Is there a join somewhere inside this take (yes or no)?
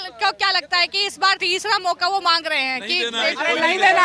yes